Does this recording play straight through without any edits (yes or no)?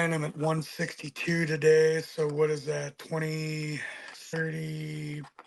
yes